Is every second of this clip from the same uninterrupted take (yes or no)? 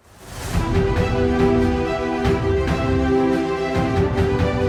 yes